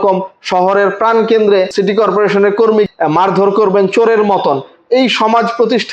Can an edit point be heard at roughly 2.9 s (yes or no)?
yes